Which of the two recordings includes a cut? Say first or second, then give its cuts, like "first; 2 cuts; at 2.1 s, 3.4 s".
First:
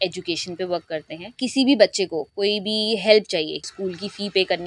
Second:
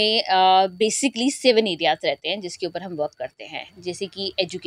first; 2 cuts; at 1.4 s, 3.7 s